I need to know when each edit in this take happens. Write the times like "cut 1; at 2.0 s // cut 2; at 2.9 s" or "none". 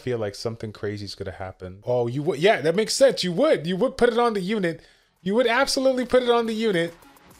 cut 1; at 1.8 s